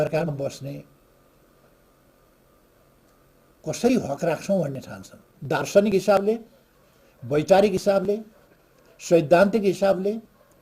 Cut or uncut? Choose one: cut